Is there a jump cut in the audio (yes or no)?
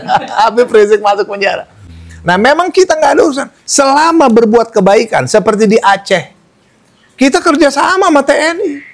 no